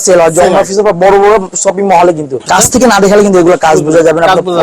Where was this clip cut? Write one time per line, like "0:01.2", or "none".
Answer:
0:02.4